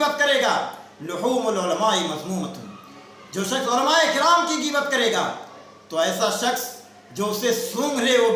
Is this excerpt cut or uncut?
uncut